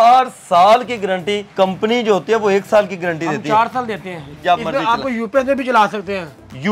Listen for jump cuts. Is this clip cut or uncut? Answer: cut